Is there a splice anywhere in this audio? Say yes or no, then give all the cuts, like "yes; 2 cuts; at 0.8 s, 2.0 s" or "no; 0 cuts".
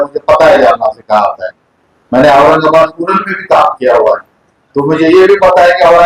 no; 0 cuts